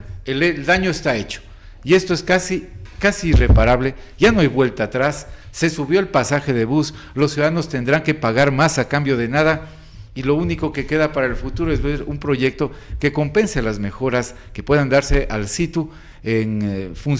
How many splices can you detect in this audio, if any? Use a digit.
0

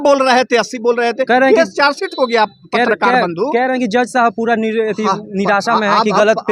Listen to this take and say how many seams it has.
0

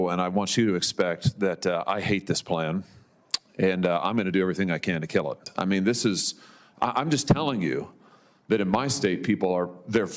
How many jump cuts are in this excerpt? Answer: 1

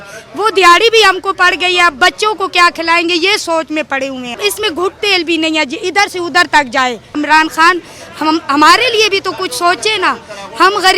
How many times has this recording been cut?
2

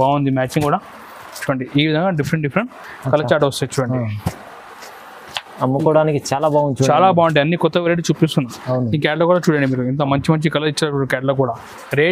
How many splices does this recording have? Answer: 0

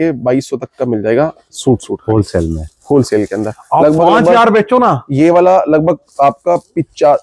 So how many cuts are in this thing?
0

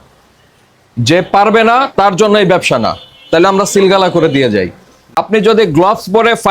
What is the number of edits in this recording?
1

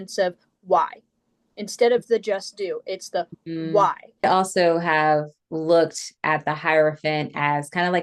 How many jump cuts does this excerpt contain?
1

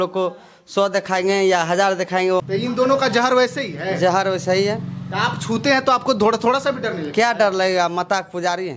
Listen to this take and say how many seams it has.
1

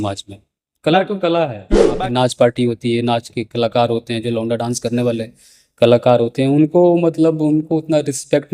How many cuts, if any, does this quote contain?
1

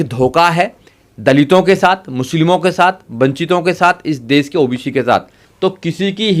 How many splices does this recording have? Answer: 1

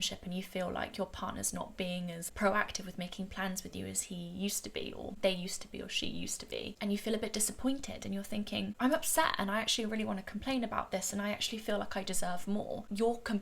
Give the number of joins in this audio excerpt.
3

